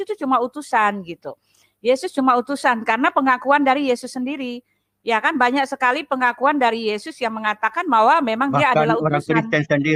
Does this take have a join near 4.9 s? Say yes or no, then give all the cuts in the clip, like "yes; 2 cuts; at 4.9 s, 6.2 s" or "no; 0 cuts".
no; 0 cuts